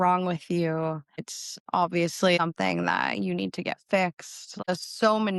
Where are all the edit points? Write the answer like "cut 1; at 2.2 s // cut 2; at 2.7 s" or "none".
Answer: cut 1; at 2.4 s // cut 2; at 4.7 s